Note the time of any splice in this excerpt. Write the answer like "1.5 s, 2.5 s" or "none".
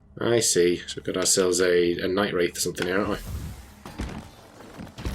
3.9 s